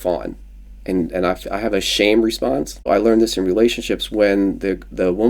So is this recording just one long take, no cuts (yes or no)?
no